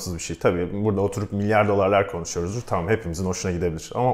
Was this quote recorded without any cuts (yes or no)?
yes